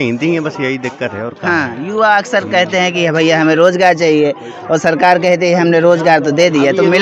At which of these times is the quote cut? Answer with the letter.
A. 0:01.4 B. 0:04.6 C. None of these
C